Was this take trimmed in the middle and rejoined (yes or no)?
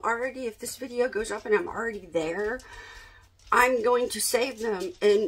no